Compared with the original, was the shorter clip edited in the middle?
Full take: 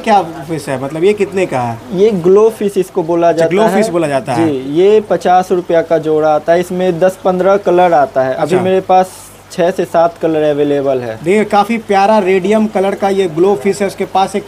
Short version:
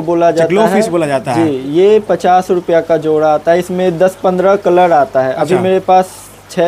no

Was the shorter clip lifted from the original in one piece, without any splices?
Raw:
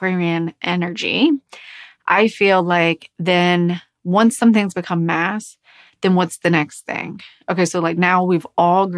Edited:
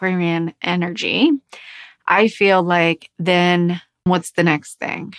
no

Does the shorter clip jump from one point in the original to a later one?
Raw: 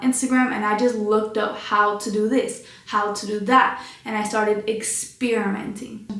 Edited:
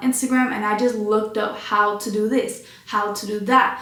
no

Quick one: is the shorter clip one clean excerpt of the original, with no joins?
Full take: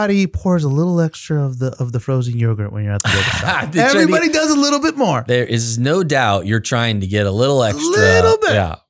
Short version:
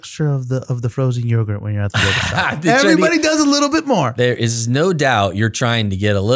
yes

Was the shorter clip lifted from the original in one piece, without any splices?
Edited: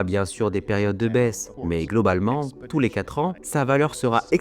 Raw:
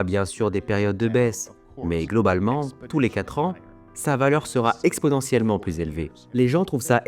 no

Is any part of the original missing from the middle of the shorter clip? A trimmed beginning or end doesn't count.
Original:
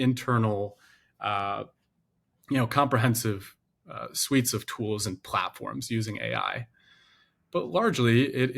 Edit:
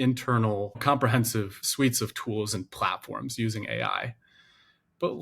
yes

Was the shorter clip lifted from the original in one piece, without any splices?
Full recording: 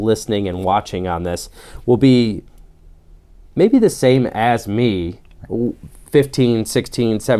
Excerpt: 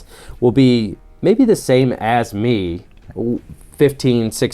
no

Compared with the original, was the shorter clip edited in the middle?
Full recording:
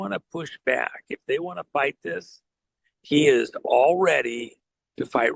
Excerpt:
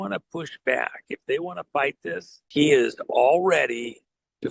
yes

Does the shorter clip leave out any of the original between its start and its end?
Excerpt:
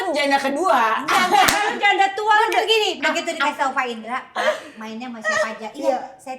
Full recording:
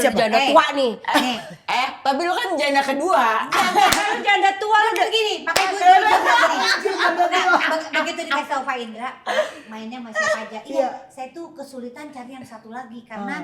yes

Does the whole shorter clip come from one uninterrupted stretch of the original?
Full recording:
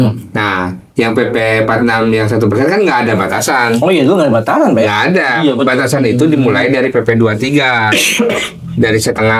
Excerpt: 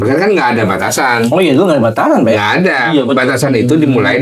yes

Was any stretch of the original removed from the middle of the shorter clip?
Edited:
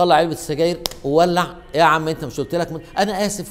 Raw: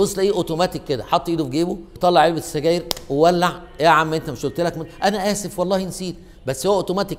no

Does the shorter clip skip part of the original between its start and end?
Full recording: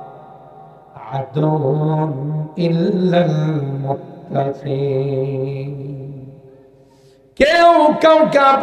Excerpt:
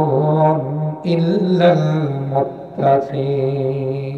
no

